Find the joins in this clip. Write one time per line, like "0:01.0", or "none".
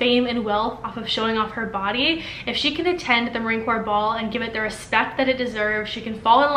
none